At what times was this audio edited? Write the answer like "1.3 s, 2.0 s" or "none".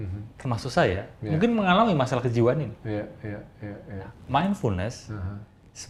none